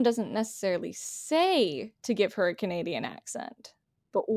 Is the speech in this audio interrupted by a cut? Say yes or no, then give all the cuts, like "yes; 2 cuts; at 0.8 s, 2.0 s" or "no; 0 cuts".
yes; 1 cut; at 1.9 s